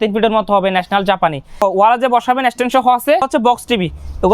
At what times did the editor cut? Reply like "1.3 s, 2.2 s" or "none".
1.6 s, 3.3 s